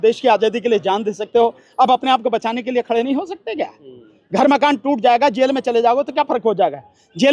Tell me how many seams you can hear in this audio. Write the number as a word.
zero